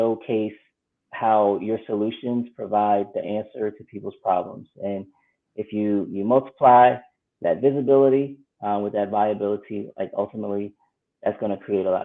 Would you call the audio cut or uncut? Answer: uncut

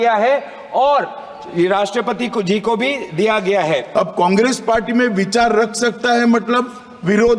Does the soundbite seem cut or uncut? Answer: cut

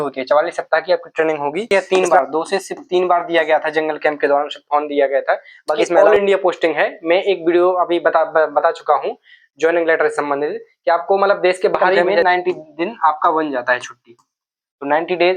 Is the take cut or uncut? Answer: cut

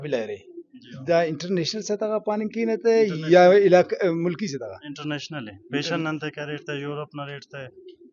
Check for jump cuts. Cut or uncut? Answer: uncut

